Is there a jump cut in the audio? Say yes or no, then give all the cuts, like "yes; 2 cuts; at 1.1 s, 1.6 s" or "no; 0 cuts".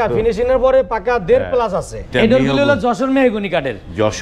yes; 1 cut; at 2.1 s